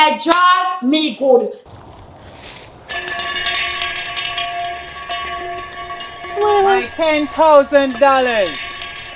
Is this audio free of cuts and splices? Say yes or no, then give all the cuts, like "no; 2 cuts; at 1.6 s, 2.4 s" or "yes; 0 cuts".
no; 1 cut; at 1.6 s